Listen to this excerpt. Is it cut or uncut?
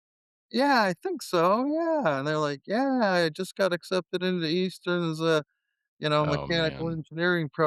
uncut